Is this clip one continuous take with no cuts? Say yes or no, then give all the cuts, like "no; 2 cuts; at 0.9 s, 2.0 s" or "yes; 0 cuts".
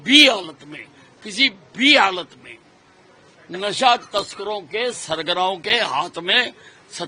yes; 0 cuts